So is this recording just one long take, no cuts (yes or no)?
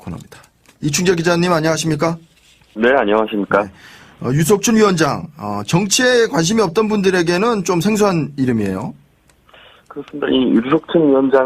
yes